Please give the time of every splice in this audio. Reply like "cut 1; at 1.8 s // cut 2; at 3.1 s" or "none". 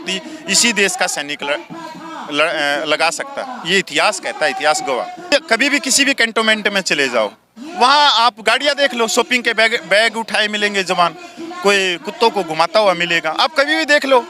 cut 1; at 5.3 s